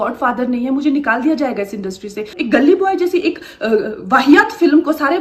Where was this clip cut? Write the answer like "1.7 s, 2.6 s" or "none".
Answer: 2.3 s